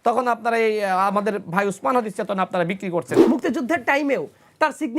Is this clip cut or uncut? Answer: cut